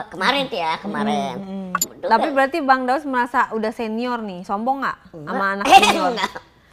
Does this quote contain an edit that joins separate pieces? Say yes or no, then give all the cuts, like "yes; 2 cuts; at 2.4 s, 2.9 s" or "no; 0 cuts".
yes; 1 cut; at 1.9 s